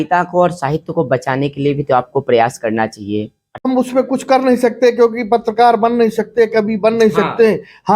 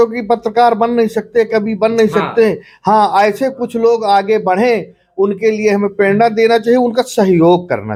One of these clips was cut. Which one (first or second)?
first